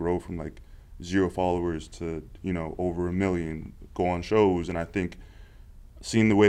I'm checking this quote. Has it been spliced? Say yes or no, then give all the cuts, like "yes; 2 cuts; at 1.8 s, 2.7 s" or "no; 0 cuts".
no; 0 cuts